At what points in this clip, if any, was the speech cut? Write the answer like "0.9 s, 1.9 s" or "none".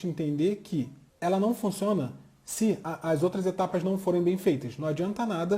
2.8 s